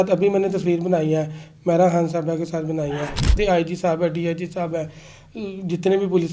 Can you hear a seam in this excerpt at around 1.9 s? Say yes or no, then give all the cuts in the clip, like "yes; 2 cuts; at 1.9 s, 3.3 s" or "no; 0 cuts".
no; 1 cut; at 3.4 s